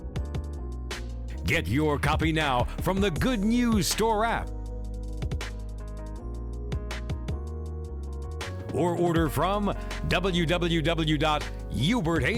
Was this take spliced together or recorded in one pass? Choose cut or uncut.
uncut